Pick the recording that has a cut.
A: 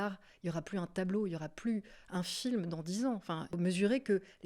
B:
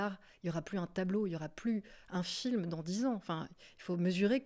A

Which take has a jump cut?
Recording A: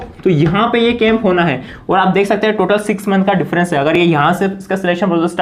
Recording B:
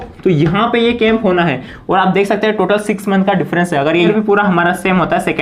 B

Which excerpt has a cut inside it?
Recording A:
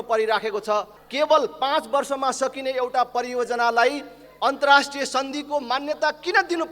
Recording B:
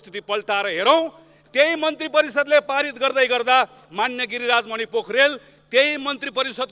A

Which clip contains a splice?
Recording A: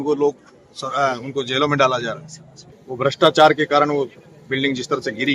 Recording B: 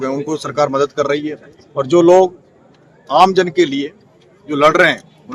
A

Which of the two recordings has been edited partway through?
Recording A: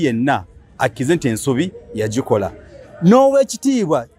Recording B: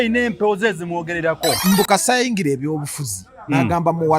B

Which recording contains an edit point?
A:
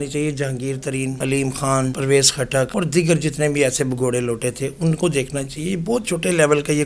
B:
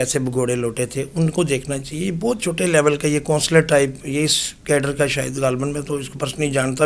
A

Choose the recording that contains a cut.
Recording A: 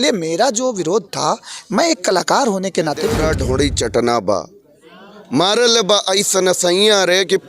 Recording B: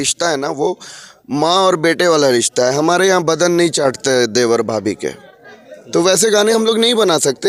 A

